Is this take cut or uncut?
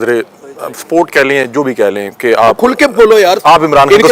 uncut